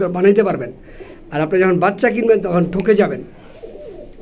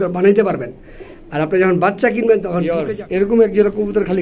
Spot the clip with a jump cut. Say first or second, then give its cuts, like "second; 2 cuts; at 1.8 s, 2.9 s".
second; 1 cut; at 2.6 s